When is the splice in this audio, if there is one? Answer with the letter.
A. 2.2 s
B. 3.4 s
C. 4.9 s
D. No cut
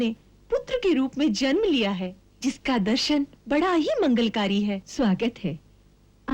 C